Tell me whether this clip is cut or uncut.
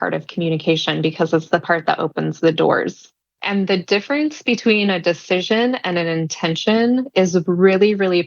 cut